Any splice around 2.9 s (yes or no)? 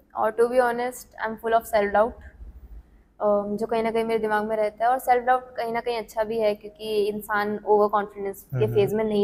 no